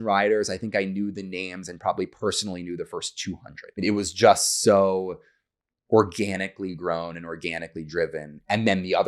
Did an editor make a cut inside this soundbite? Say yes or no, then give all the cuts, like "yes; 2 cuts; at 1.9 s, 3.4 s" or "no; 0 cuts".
yes; 1 cut; at 3.8 s